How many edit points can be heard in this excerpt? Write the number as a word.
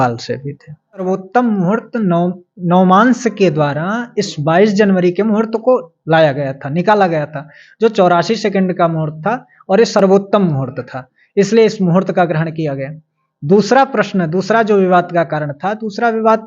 one